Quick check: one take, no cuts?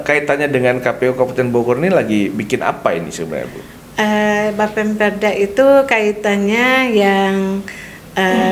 yes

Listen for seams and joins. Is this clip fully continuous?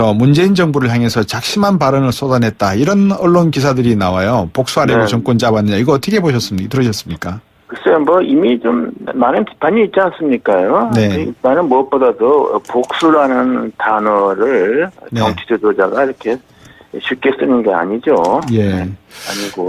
no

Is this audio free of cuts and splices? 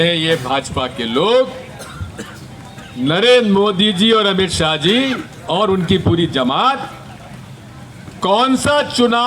yes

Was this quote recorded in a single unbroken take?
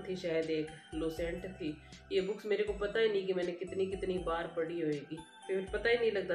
no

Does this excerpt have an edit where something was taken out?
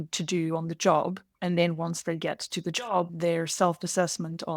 yes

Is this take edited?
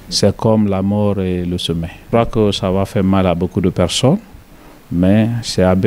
yes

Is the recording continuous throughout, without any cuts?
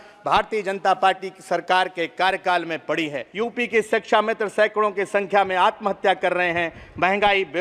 no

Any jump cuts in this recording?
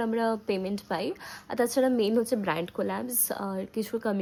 no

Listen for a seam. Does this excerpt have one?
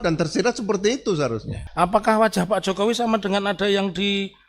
yes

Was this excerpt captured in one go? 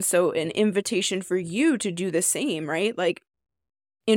yes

